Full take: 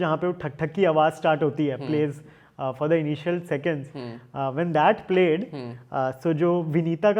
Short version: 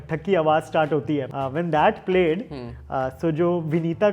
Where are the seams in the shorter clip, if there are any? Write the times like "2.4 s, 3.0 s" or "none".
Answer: 1.3 s